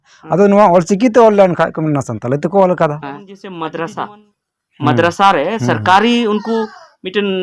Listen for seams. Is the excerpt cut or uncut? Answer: cut